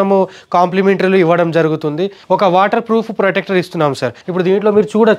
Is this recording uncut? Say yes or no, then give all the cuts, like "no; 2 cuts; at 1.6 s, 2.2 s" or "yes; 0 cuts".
no; 2 cuts; at 2.2 s, 4.2 s